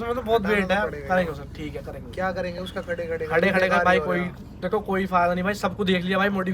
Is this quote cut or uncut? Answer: uncut